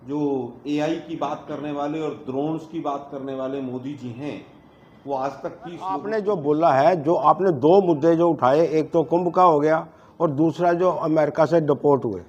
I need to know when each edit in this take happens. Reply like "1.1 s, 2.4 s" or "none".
6.1 s

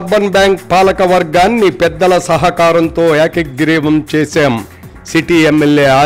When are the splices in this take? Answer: none

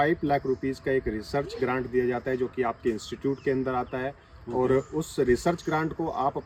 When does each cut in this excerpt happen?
none

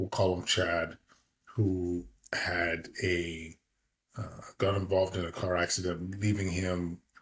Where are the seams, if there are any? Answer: none

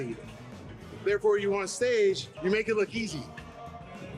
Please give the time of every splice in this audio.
2.3 s

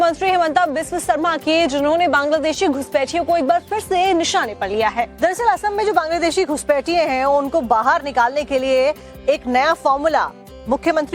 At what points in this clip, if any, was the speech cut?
none

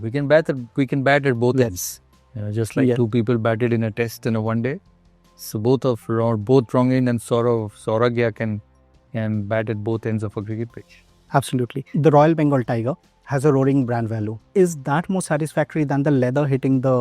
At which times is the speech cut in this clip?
11.9 s, 14.4 s

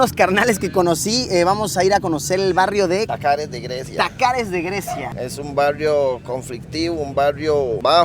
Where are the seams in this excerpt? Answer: 3.1 s, 5.1 s

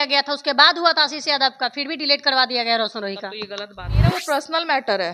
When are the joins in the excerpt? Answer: 4.0 s

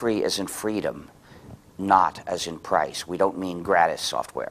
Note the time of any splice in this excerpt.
1.7 s

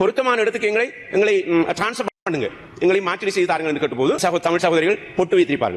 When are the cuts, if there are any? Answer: 4.2 s

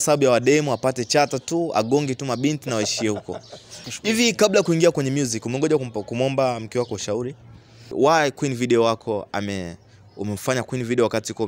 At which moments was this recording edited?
3.8 s, 7.9 s

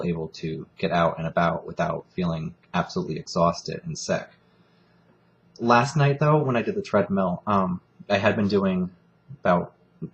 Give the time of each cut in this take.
2.5 s

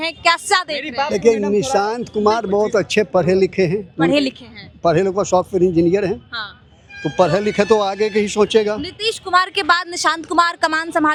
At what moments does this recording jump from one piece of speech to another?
none

